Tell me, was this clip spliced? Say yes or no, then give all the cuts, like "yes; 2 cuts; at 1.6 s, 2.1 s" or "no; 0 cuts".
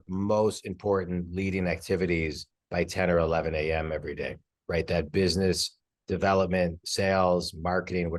no; 0 cuts